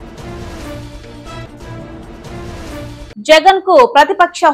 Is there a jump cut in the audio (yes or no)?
yes